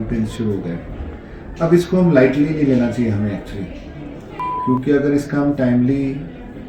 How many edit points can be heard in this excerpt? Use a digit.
1